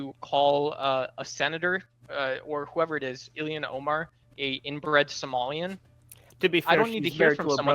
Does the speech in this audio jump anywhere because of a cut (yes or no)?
yes